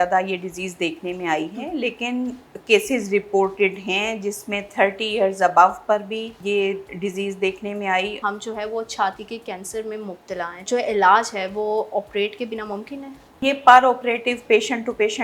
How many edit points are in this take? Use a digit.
4